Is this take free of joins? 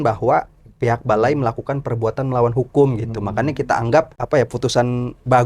no; 1 cut; at 4.2 s

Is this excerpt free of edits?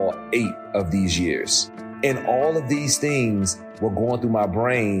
no; 1 cut; at 1.8 s

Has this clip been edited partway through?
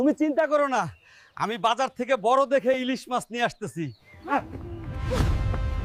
no; 0 cuts

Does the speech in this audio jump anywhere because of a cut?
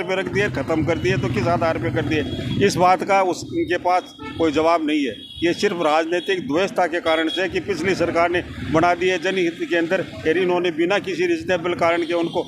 no; 0 cuts

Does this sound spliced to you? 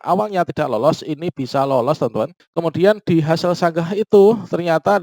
yes; 1 cut; at 2.4 s

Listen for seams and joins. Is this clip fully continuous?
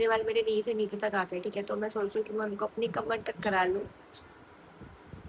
yes; 0 cuts

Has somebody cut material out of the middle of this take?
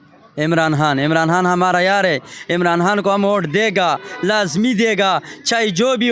no; 0 cuts

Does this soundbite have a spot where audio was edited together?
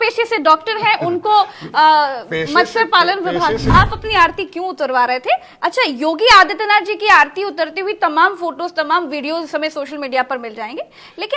yes; 1 cut; at 3.7 s

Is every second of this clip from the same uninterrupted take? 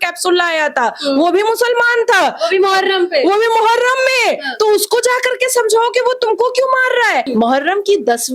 no; 1 cut; at 7.3 s

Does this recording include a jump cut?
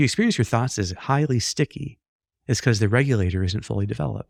no; 0 cuts

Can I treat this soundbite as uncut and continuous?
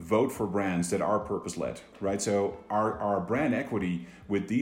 no; 1 cut; at 1.9 s

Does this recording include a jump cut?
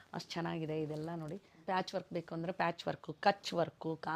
yes; 1 cut; at 1.5 s

